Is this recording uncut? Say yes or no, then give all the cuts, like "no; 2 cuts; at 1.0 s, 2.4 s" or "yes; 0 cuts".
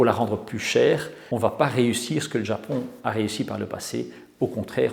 yes; 0 cuts